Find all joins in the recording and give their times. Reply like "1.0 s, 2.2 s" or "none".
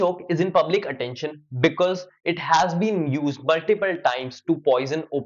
none